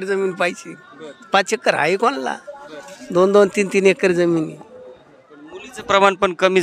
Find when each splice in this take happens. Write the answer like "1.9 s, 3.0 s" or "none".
none